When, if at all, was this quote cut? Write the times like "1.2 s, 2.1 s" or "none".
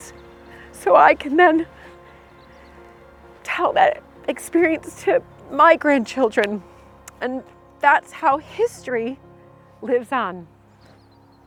none